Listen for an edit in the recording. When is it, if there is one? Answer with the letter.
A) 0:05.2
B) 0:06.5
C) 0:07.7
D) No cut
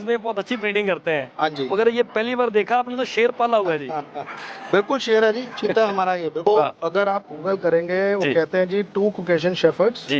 B